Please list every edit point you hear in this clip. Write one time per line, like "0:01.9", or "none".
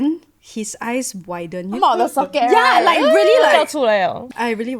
0:01.8